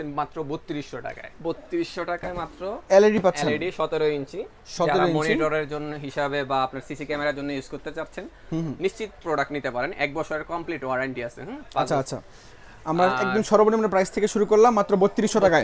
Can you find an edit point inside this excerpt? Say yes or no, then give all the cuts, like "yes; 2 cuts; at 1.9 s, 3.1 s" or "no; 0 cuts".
no; 0 cuts